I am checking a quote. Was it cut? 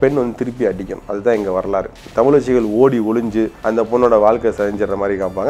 yes; 2 cuts; at 2.0 s, 3.6 s

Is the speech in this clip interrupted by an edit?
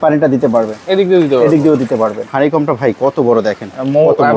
yes; 1 cut; at 2.3 s

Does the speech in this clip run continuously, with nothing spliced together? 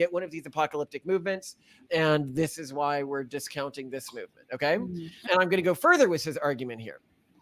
yes; 0 cuts

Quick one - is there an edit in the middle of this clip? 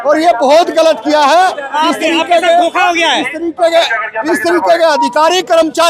no; 0 cuts

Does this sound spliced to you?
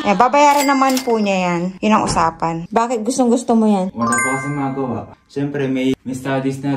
yes; 1 cut; at 2.6 s

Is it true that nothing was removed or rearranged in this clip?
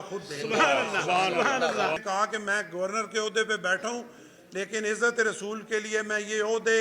no; 1 cut; at 2.0 s

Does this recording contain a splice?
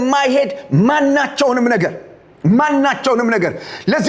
no; 0 cuts

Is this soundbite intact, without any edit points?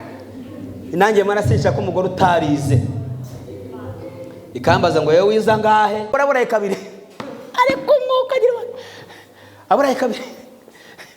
no; 1 cut; at 6.0 s

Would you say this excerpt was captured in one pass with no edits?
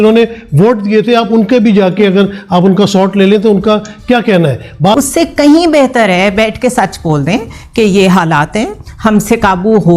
no; 1 cut; at 4.9 s

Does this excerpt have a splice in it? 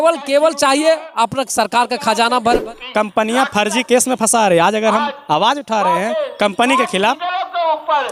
yes; 1 cut; at 2.6 s

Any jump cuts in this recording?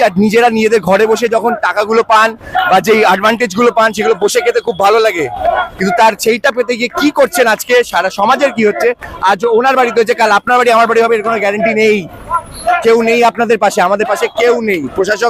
no; 0 cuts

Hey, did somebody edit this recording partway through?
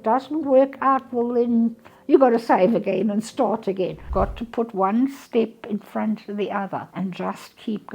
yes; 2 cuts; at 4.1 s, 6.9 s

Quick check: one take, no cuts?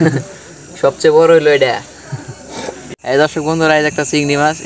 no; 1 cut; at 2.8 s

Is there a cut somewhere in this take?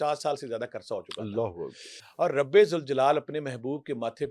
yes; 1 cut; at 2.1 s

